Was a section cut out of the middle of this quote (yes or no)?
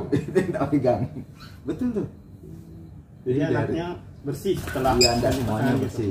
no